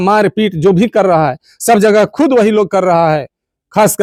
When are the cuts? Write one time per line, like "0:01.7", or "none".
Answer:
none

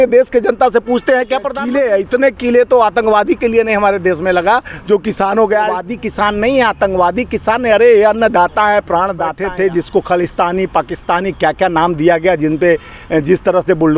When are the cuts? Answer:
0:01.5
0:05.8
0:09.4

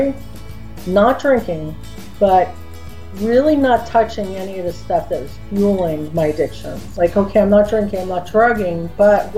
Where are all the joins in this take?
0:06.8

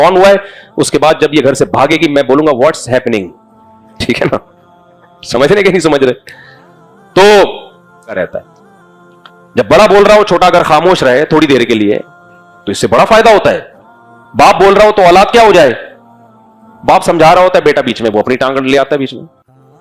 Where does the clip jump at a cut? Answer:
0:08.2

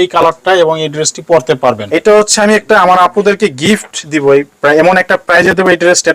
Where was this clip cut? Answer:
0:01.8

